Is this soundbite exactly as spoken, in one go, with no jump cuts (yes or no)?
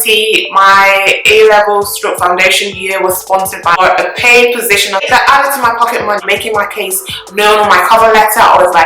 no